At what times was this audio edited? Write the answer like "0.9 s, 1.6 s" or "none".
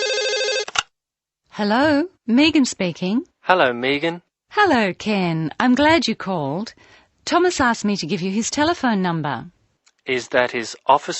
1.0 s

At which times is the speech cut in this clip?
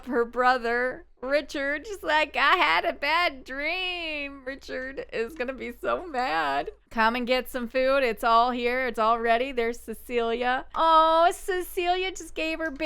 6.8 s, 10.7 s

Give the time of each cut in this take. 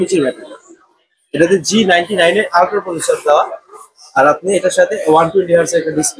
none

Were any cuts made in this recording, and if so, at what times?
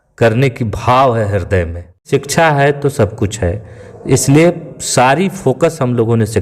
2.0 s

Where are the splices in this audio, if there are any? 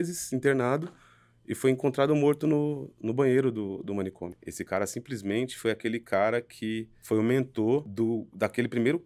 4.4 s, 6.9 s, 7.9 s

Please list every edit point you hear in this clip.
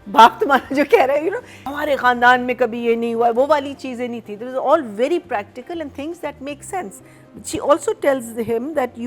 1.7 s

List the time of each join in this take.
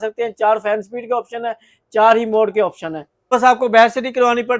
3.3 s

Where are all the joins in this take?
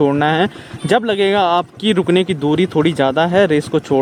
none

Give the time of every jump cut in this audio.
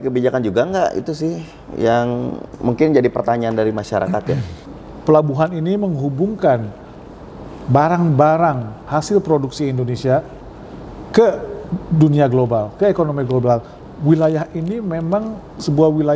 4.6 s, 13.7 s

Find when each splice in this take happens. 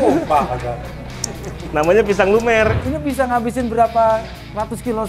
2.8 s

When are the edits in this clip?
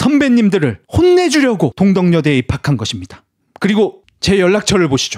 none

